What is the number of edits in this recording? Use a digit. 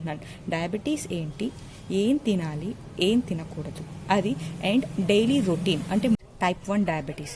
1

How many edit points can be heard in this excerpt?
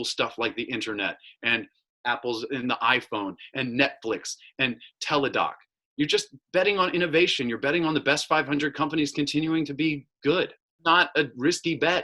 1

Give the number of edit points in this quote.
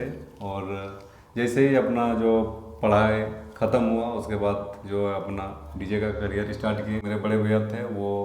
1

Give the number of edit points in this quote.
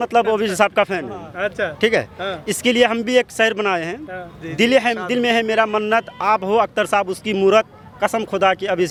0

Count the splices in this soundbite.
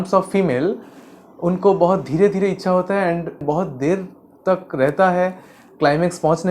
1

